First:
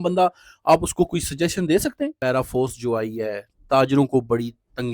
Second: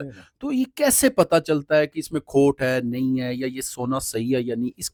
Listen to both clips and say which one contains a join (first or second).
first